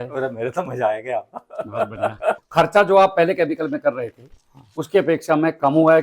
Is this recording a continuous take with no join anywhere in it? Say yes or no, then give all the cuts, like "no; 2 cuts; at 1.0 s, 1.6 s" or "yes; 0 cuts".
no; 1 cut; at 2.4 s